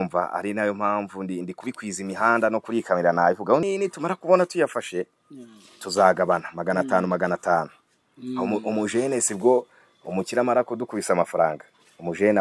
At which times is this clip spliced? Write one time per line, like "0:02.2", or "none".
0:03.6